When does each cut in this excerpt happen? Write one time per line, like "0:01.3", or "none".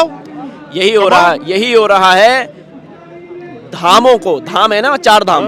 none